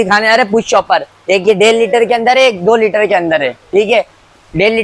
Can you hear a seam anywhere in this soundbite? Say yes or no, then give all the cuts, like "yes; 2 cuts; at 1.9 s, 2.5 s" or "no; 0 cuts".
no; 0 cuts